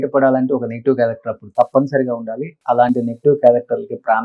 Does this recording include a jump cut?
no; 0 cuts

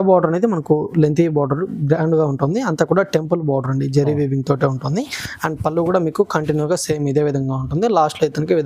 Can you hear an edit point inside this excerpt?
no; 0 cuts

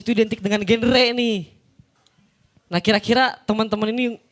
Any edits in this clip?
no; 0 cuts

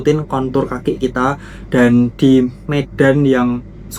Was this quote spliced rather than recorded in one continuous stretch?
no; 0 cuts

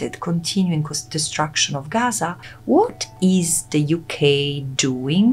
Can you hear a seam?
yes; 1 cut; at 2.5 s

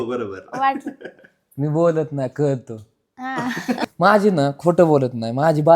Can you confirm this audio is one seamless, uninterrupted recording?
no; 1 cut; at 3.8 s

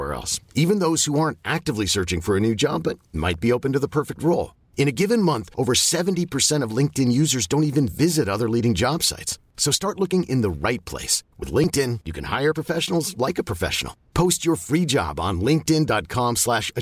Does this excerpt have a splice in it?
no; 0 cuts

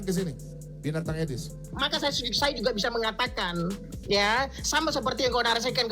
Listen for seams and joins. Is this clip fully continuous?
no; 1 cut; at 1.7 s

